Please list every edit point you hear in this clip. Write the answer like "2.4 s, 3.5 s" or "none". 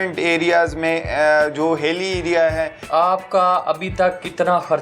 2.8 s

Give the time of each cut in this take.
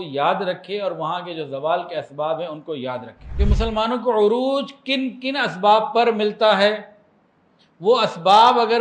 3.2 s

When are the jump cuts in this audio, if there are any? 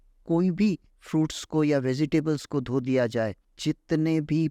0.9 s, 3.5 s

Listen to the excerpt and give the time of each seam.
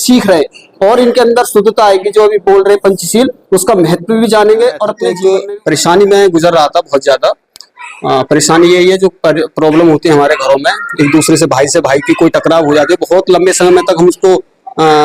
5.1 s

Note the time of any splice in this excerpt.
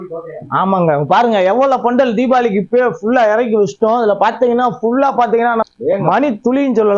5.6 s

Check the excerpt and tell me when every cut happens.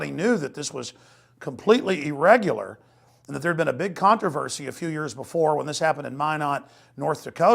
5.2 s

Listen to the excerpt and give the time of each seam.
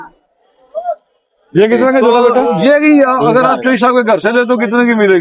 2.4 s

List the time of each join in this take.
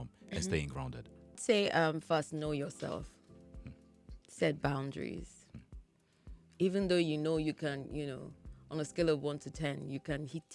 1.4 s

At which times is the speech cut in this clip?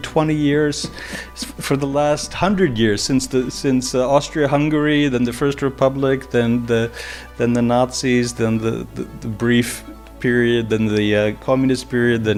none

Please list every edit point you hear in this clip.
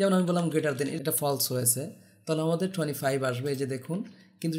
0.9 s

